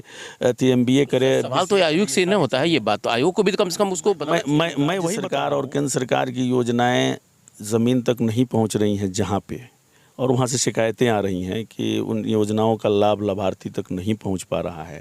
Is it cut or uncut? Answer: cut